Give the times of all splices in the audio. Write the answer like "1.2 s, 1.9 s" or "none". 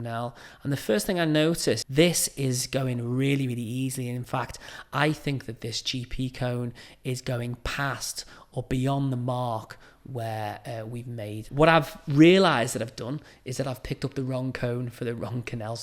1.8 s, 11.4 s